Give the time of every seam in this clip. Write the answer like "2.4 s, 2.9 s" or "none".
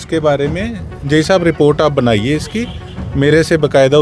none

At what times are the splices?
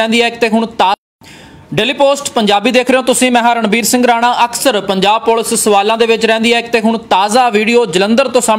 1.0 s

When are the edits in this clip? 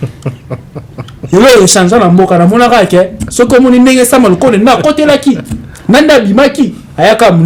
none

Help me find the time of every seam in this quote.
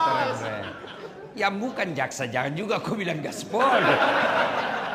none

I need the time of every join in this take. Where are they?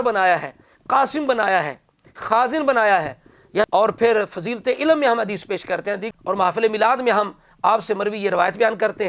3.7 s, 6.0 s

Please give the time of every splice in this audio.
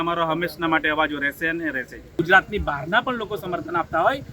2.1 s

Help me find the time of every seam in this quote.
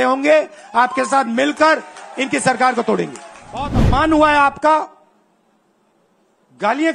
3.8 s

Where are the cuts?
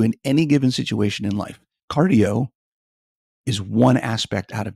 none

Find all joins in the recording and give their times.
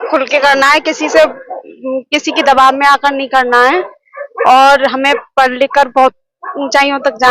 none

